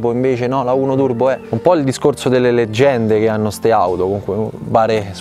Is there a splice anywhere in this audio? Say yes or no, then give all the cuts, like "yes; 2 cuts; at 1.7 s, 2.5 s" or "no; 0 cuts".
yes; 1 cut; at 1.5 s